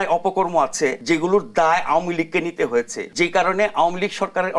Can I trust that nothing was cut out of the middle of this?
no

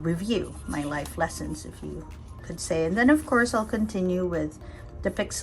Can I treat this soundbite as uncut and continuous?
yes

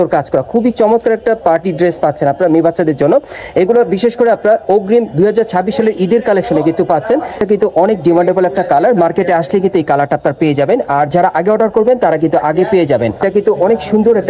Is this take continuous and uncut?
no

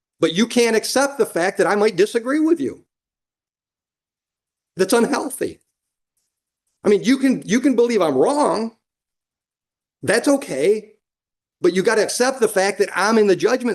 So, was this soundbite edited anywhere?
no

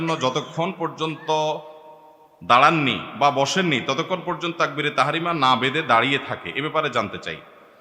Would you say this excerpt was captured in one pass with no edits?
yes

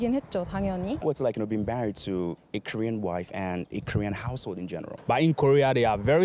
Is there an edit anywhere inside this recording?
yes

